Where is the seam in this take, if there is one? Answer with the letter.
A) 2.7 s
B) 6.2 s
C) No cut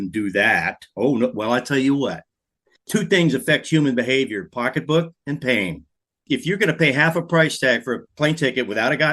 A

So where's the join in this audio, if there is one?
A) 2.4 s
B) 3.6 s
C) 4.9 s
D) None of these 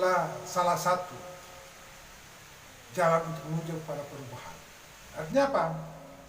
C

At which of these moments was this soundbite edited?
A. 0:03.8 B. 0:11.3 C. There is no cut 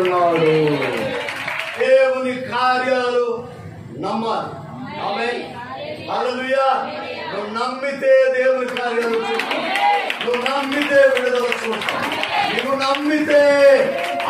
C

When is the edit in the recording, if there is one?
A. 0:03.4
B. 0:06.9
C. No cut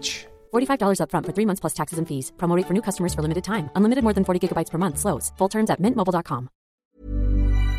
B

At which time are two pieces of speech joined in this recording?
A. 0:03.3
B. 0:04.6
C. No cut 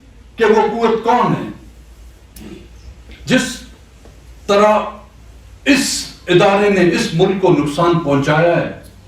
C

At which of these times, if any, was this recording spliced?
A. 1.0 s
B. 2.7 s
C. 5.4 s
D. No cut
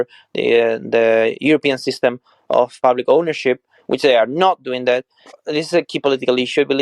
C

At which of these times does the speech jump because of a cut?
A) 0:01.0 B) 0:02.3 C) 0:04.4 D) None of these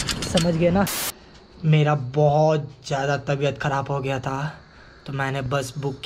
A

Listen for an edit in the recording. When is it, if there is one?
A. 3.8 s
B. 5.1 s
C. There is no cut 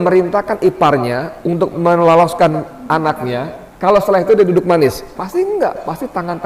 B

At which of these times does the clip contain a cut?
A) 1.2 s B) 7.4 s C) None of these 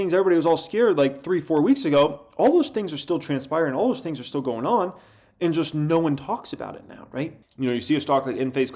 B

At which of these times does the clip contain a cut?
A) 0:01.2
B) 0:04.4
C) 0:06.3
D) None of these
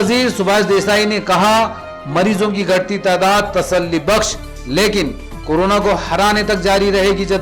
D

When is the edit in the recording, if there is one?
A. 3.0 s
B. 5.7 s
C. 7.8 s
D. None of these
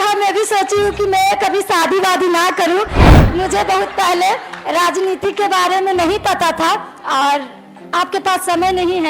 A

